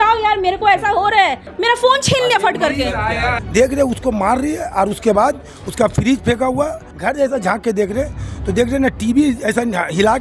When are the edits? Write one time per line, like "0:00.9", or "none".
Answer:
0:01.5
0:03.1
0:06.9